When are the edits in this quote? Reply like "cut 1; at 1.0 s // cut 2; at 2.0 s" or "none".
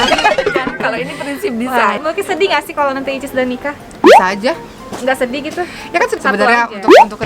cut 1; at 2.0 s // cut 2; at 6.2 s